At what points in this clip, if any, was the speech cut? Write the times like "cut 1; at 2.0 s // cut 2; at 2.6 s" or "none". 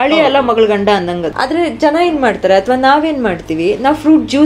cut 1; at 1.3 s